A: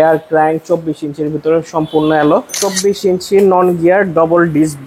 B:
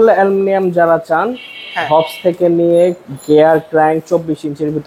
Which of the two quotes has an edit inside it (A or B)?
A